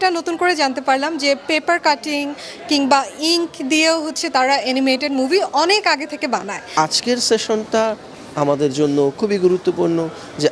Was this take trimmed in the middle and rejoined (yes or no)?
yes